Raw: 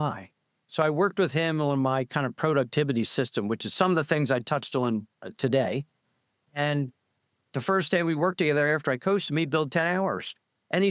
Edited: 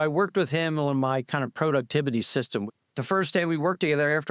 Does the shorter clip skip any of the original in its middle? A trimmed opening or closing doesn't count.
yes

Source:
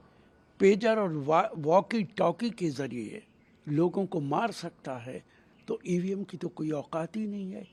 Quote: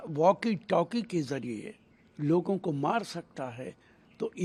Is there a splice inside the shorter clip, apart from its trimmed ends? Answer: no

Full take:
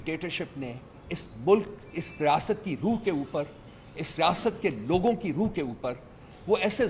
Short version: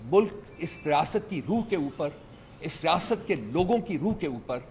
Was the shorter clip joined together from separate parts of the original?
no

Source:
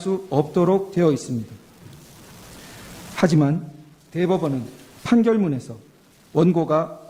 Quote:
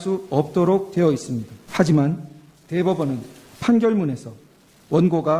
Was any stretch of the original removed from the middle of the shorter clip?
yes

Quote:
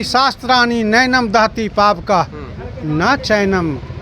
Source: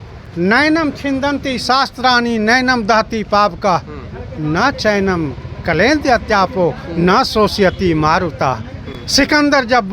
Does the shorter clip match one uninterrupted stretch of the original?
yes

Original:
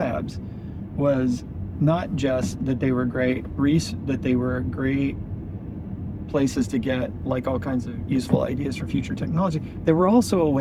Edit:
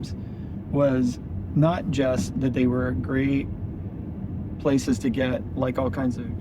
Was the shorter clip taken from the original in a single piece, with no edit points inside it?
no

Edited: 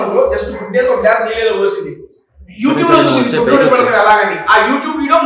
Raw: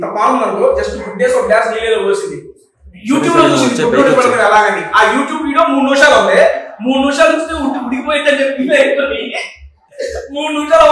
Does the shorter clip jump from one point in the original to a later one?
no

